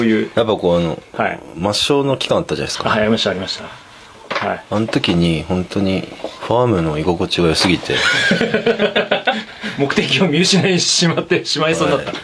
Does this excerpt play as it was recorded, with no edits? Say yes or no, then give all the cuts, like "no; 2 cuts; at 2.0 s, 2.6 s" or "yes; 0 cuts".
no; 1 cut; at 7.8 s